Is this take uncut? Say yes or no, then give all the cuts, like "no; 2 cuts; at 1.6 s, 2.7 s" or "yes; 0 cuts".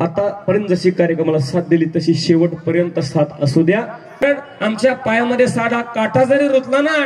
no; 1 cut; at 4.2 s